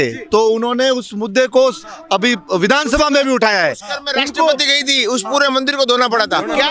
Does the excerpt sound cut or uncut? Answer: uncut